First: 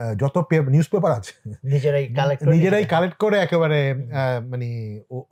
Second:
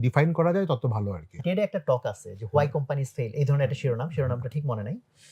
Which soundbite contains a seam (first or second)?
second